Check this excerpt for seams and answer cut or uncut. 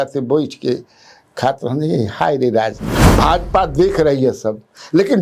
cut